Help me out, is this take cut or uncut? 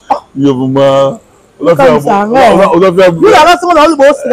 uncut